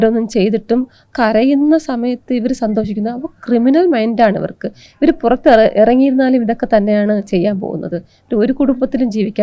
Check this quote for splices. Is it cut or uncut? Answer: uncut